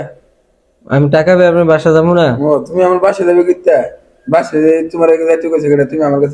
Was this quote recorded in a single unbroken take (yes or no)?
yes